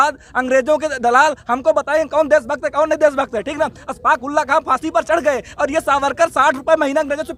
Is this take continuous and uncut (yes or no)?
yes